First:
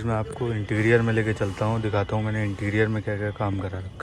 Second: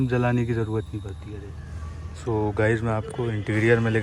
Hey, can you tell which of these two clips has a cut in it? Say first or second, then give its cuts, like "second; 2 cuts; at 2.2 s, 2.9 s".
second; 1 cut; at 1.2 s